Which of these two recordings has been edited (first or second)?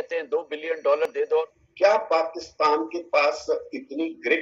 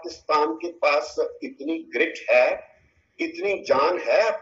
first